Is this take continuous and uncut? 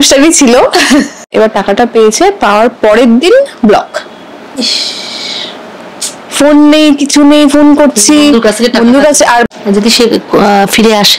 no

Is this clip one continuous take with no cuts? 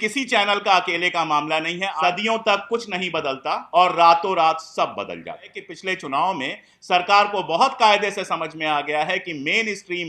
no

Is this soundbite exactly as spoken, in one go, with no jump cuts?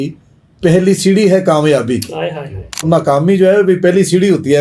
no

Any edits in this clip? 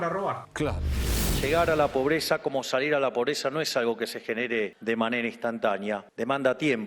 yes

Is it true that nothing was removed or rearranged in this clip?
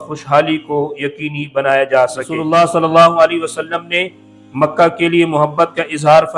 no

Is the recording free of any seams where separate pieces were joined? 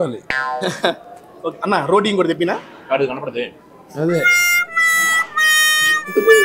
yes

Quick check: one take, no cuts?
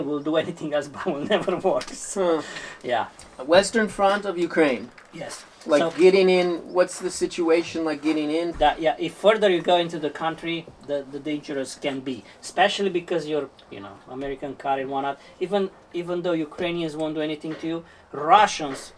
no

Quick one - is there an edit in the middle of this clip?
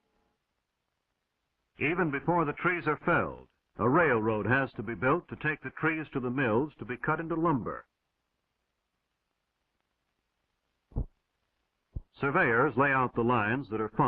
yes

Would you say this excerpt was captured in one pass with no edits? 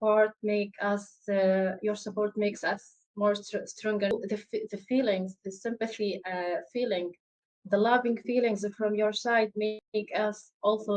no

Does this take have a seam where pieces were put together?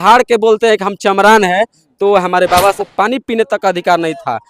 yes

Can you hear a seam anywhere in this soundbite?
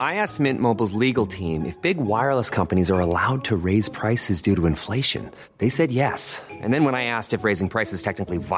no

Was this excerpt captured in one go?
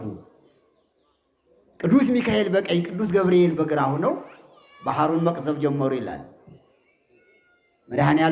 yes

